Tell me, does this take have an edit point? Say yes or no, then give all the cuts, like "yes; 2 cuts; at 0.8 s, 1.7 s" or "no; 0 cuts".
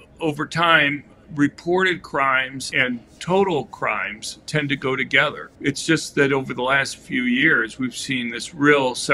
yes; 2 cuts; at 2.7 s, 5.4 s